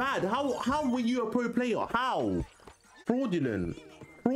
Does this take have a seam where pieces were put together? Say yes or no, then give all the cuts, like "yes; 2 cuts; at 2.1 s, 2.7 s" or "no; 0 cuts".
yes; 1 cut; at 3.0 s